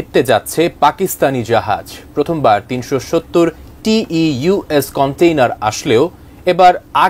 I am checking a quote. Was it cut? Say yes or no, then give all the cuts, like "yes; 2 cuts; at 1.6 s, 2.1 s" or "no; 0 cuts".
no; 0 cuts